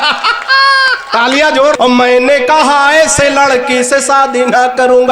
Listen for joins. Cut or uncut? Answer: cut